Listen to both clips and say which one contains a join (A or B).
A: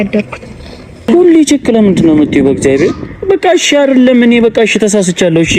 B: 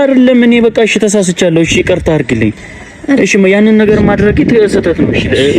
A